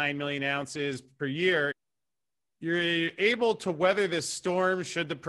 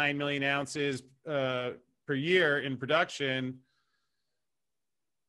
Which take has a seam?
first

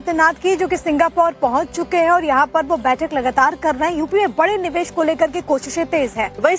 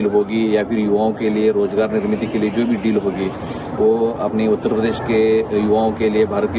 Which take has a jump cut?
first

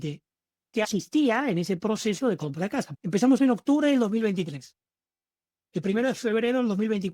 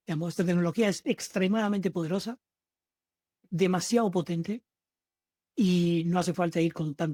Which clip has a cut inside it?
first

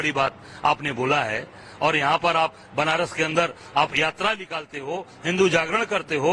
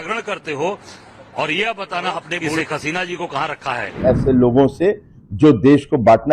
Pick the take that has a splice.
second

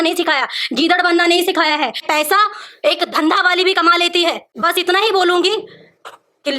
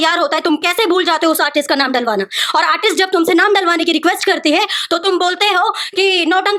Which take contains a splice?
first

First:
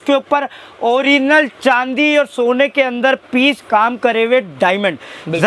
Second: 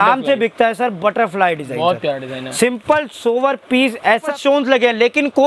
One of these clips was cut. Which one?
second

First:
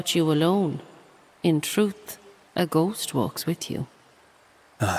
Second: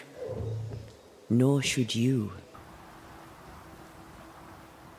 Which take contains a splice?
second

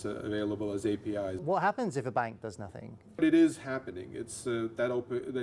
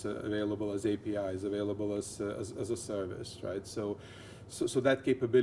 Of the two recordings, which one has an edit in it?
first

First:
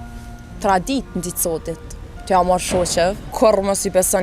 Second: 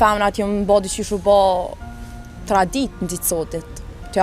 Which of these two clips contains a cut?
first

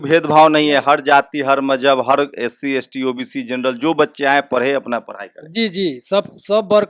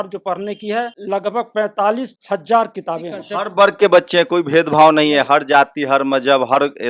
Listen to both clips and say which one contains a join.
second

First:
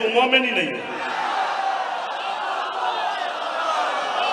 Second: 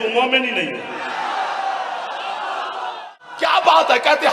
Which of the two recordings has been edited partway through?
second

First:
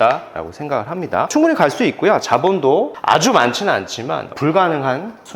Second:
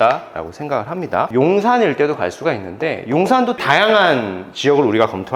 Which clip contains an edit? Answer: second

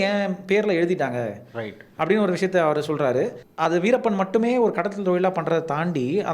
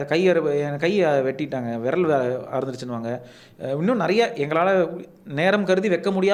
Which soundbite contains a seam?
first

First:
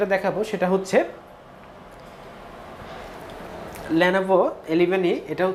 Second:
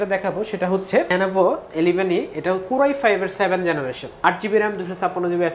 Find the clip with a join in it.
second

